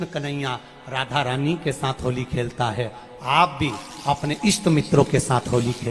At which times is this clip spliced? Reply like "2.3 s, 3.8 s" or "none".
none